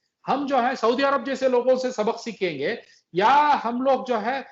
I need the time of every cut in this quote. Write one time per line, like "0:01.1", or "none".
none

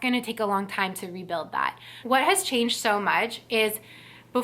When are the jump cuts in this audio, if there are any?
0:02.0

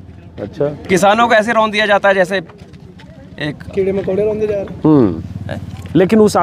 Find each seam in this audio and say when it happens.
none

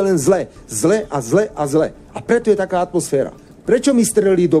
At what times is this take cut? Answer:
0:03.5

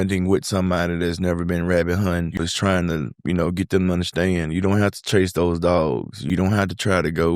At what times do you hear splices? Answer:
0:02.5
0:06.2

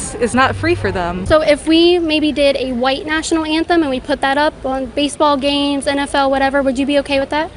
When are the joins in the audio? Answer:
0:01.2

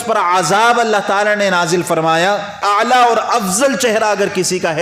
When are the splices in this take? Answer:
0:02.6

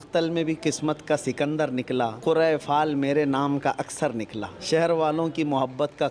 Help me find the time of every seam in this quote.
0:02.2
0:04.5

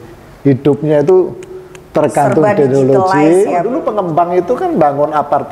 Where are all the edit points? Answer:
0:04.1

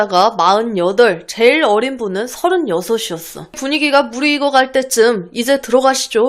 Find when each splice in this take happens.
0:03.6

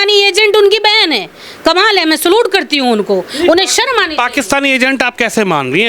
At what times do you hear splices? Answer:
none

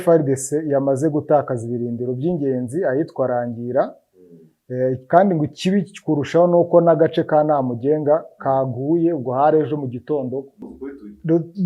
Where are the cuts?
0:10.7

